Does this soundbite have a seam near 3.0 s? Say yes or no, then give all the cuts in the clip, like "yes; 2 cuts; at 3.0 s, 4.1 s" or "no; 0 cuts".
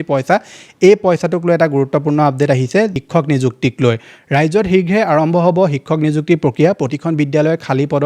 yes; 1 cut; at 3.0 s